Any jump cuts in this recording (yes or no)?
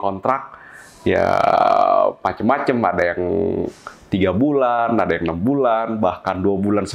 no